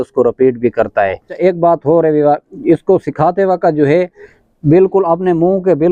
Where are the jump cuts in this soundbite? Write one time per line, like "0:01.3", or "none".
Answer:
0:01.3